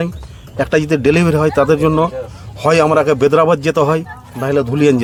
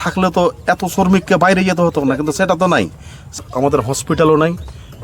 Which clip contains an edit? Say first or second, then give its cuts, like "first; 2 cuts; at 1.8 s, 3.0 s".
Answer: second; 1 cut; at 3.4 s